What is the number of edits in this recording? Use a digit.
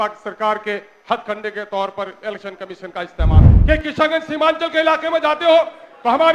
1